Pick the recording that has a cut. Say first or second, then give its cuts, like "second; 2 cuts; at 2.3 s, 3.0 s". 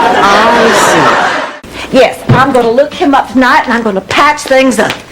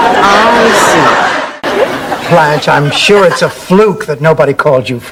first; 1 cut; at 1.6 s